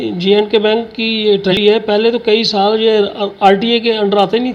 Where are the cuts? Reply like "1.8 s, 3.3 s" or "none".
1.5 s